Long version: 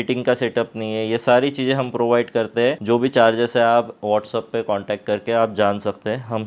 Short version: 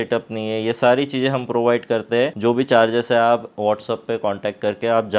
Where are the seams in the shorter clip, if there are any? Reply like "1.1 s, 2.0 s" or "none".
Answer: none